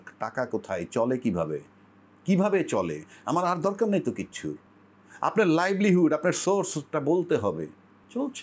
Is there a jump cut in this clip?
no; 0 cuts

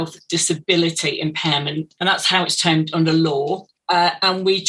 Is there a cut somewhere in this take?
yes; 2 cuts; at 1.9 s, 3.7 s

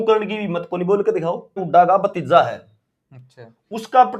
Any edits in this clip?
yes; 1 cut; at 1.6 s

